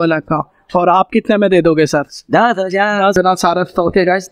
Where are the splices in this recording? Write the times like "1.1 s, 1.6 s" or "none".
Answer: 3.1 s